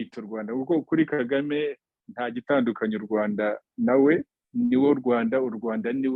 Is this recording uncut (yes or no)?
yes